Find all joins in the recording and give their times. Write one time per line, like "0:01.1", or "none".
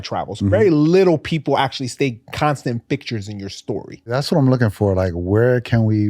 0:04.1